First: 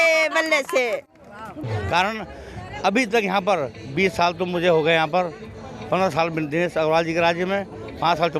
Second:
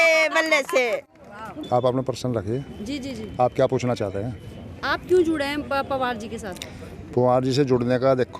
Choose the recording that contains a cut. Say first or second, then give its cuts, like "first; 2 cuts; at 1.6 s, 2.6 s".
first; 1 cut; at 1.6 s